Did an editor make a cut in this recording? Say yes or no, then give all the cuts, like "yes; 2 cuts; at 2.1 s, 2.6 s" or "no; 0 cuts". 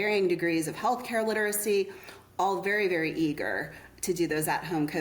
no; 0 cuts